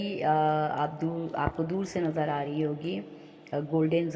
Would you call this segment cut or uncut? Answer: uncut